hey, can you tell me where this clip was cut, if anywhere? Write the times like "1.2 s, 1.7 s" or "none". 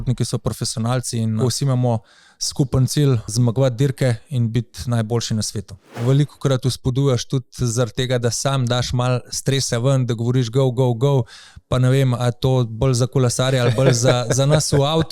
1.4 s, 3.3 s, 6.0 s